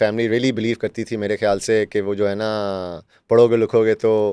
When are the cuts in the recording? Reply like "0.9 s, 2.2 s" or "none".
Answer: none